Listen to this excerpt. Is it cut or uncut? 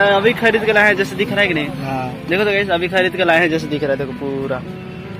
uncut